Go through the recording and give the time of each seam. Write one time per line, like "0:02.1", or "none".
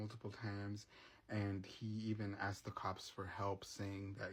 none